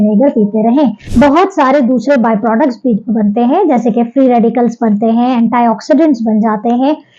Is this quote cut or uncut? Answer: cut